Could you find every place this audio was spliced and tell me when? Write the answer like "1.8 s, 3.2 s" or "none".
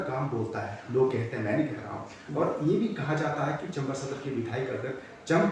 none